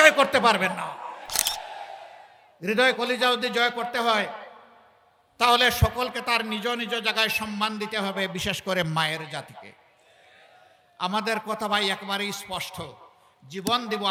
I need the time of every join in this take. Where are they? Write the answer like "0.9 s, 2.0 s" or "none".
none